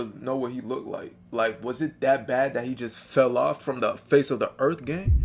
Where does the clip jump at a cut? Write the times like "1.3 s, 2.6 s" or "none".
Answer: none